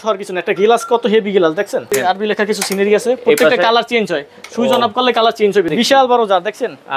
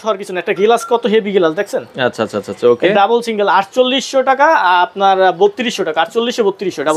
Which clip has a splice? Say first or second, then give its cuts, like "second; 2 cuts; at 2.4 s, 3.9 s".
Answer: first; 2 cuts; at 1.9 s, 5.7 s